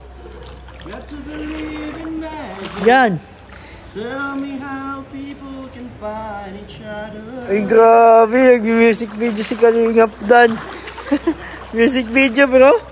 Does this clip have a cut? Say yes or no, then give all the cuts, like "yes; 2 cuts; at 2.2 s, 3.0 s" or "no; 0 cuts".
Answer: no; 0 cuts